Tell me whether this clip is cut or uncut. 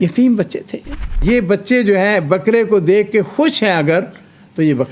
cut